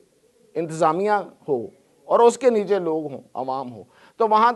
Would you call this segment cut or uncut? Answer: uncut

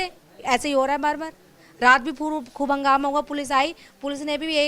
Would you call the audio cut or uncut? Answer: uncut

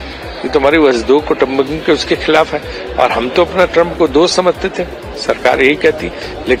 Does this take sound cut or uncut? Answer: uncut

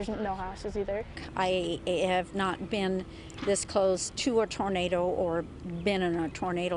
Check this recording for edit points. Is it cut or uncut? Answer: cut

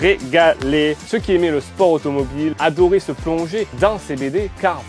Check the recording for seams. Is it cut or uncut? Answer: cut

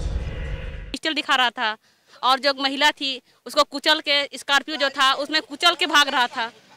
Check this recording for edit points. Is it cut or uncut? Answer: cut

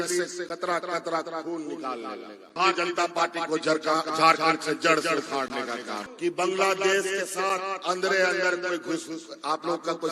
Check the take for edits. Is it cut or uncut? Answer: cut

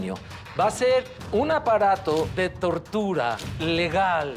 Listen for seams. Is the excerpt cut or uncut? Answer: cut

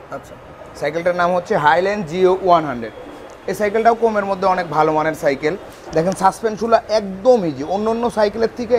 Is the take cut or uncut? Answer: uncut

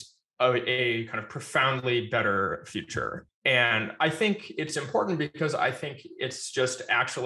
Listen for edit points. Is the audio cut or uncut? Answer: uncut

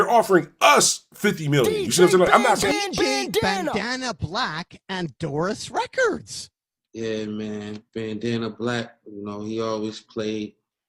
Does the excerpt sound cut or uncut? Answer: cut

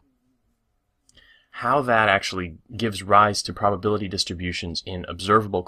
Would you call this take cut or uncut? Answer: cut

